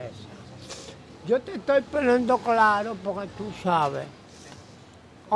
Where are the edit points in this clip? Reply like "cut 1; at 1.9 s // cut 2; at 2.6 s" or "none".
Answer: none